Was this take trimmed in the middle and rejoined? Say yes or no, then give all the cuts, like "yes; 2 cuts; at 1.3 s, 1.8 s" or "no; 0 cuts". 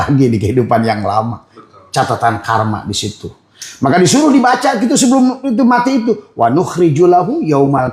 no; 0 cuts